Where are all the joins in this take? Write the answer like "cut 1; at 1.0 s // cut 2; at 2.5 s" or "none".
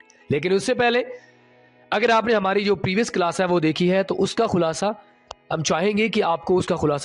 none